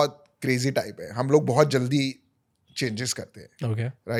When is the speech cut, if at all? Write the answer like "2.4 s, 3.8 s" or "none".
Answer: none